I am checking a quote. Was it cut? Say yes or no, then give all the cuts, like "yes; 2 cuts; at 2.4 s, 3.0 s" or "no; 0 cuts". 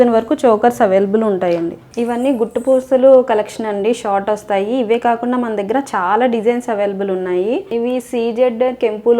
yes; 2 cuts; at 1.8 s, 7.7 s